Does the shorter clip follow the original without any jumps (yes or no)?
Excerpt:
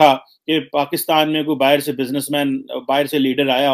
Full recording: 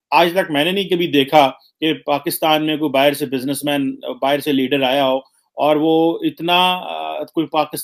yes